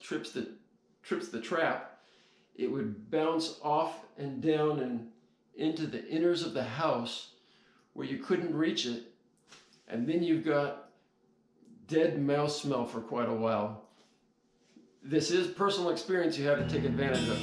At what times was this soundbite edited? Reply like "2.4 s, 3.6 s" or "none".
none